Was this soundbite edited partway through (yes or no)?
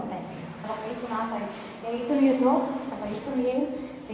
no